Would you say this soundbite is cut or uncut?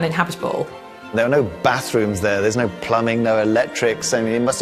cut